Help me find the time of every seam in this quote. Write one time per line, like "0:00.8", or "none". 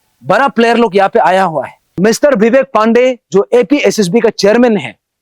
0:02.0